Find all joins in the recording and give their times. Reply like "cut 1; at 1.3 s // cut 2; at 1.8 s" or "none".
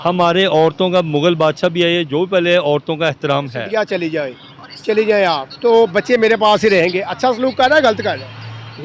cut 1; at 3.6 s